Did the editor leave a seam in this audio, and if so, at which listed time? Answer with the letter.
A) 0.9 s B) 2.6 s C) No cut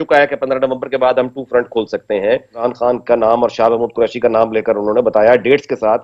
B